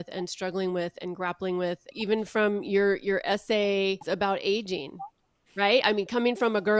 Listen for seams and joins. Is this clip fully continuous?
no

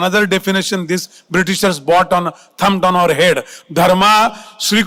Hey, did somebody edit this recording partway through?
no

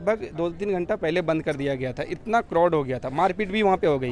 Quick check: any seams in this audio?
no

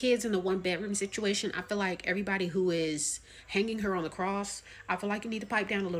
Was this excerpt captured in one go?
yes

